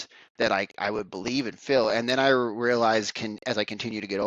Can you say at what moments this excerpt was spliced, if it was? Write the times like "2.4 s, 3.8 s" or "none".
none